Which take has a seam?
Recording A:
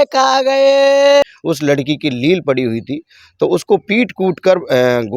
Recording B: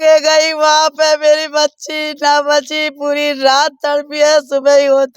A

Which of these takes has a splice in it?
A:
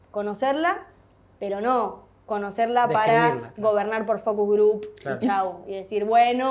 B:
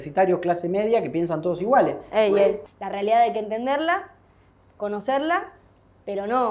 B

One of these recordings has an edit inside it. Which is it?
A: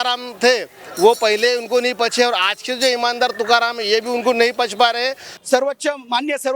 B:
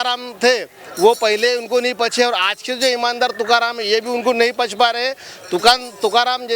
A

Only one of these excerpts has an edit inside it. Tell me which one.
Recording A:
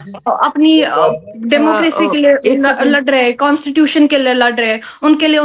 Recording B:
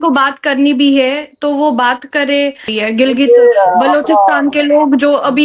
B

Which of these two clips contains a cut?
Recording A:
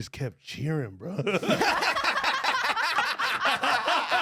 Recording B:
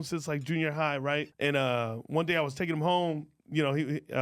B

